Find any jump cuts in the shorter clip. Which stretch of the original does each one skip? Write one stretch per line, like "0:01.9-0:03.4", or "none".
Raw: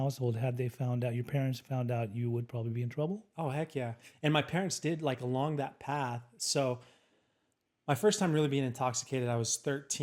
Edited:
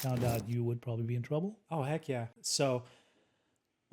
0:04.0-0:06.3